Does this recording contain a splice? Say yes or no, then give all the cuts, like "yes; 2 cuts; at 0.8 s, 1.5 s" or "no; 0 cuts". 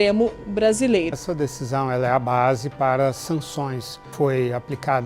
yes; 2 cuts; at 1.2 s, 4.0 s